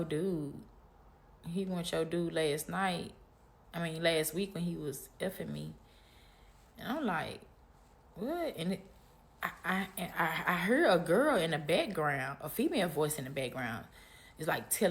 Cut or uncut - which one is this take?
uncut